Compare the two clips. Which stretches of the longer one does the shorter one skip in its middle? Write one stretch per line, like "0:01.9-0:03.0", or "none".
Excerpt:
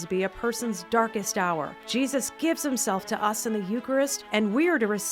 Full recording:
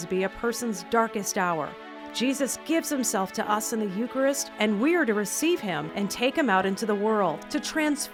0:01.8-0:02.0